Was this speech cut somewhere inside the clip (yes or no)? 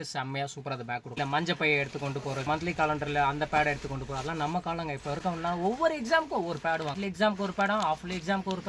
yes